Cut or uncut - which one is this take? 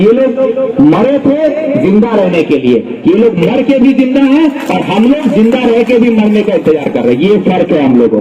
uncut